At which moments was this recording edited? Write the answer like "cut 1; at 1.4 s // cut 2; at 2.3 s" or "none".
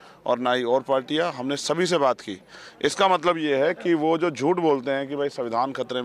none